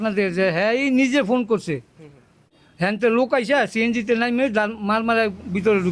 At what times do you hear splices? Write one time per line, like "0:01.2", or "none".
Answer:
0:02.6